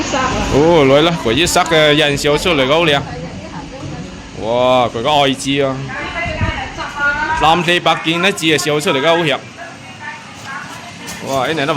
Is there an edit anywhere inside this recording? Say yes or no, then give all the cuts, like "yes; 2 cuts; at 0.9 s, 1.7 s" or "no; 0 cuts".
no; 0 cuts